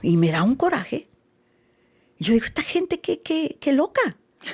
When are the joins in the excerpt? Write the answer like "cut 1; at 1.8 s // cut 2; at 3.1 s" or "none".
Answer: none